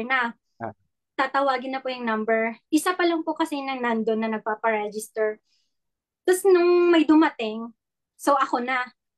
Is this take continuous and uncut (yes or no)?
yes